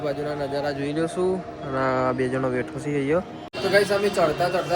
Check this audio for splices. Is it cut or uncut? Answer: cut